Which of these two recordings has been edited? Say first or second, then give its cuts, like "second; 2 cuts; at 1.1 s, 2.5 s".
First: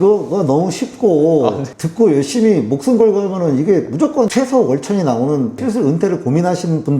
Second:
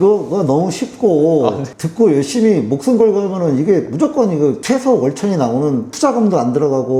first; 2 cuts; at 4.3 s, 5.6 s